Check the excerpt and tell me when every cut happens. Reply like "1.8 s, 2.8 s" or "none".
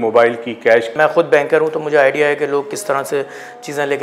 0.9 s